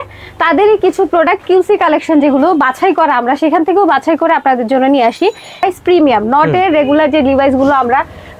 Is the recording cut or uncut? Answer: cut